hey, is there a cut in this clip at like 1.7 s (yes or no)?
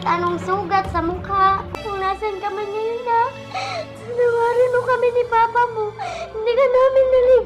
yes